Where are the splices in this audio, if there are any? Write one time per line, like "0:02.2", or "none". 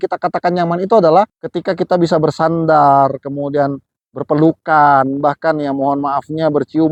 none